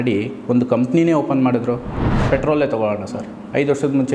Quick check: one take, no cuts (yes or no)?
no